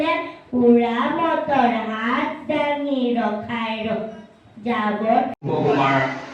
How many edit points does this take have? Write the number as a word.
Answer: one